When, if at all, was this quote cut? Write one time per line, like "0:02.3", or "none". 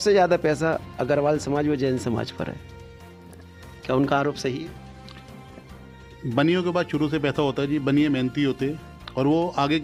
none